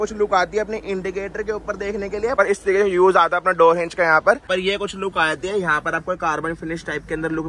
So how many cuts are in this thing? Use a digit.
2